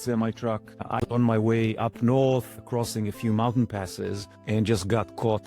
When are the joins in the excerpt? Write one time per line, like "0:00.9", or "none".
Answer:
0:01.0